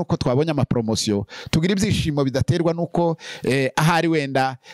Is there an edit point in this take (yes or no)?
no